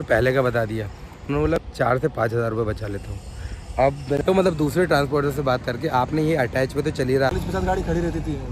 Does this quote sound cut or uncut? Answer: cut